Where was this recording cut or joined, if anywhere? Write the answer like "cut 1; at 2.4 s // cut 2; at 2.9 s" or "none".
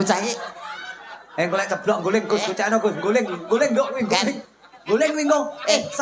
none